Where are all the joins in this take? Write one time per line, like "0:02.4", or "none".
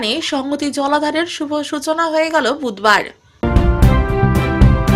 0:03.4